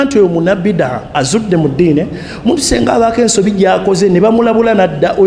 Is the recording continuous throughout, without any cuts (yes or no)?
no